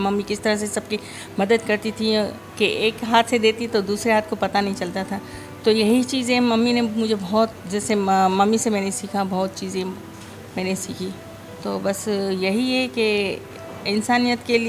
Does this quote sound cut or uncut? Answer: uncut